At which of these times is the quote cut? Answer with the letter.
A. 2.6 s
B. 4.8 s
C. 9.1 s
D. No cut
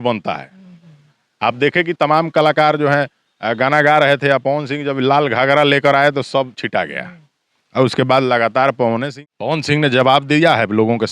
C